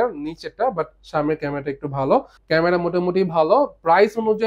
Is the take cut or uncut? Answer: cut